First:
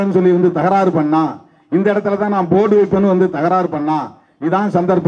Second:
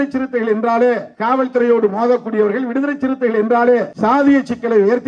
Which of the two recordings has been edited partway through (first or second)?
second